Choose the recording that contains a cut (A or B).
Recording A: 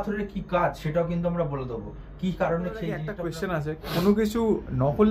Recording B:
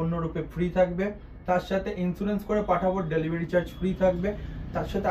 A